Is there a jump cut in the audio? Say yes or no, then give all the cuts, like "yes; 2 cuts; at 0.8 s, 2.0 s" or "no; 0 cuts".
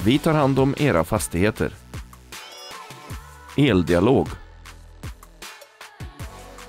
yes; 1 cut; at 4.3 s